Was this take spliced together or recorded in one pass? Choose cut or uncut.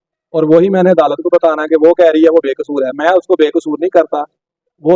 uncut